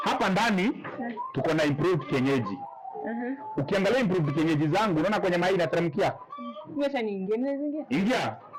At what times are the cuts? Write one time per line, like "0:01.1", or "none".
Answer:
none